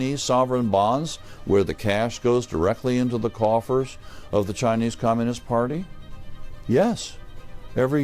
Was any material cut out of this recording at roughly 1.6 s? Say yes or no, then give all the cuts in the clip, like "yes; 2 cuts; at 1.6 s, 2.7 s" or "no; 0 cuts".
no; 0 cuts